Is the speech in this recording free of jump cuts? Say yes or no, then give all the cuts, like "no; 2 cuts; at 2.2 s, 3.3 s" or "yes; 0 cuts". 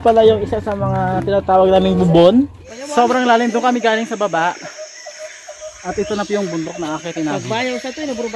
no; 1 cut; at 2.6 s